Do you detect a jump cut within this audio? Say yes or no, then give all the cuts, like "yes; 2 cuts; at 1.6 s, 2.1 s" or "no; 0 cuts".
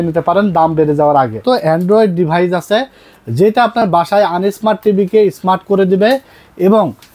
yes; 1 cut; at 1.4 s